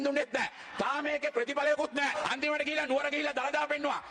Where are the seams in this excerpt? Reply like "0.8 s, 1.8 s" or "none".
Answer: 2.2 s